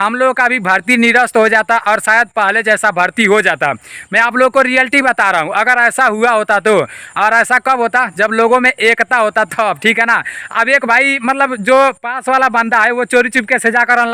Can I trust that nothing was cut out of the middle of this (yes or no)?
yes